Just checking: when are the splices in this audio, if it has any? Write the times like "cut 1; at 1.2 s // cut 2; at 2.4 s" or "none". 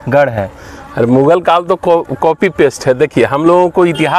none